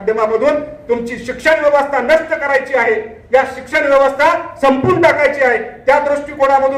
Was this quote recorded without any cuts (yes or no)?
yes